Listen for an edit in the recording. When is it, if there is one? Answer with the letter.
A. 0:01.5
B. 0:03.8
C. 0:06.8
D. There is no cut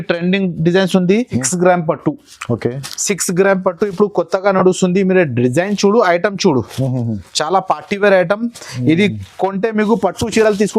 A